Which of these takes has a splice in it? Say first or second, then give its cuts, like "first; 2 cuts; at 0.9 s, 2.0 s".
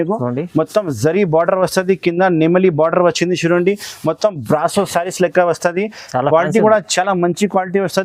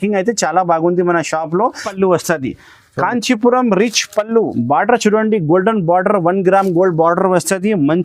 second; 1 cut; at 1.9 s